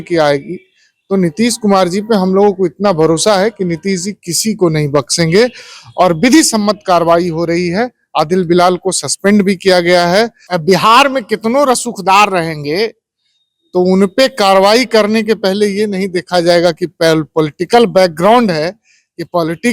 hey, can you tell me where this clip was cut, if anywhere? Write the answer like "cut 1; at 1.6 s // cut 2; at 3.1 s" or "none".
cut 1; at 10.4 s